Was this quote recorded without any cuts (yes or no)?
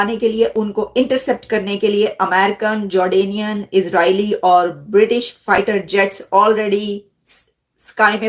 yes